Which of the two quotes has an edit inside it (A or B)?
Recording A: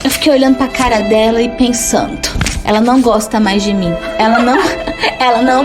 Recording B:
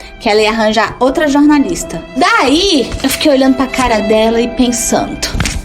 B